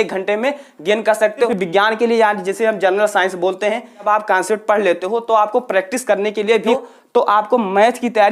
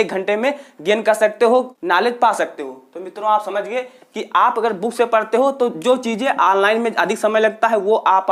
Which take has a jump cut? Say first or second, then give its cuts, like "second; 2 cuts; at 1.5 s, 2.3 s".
first; 3 cuts; at 1.5 s, 4.0 s, 6.7 s